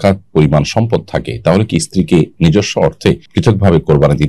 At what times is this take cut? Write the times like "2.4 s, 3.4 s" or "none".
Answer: 3.3 s